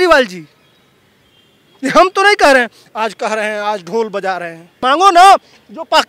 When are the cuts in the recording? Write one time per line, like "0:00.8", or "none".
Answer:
0:04.7